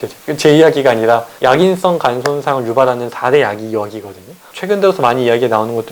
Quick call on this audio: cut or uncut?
cut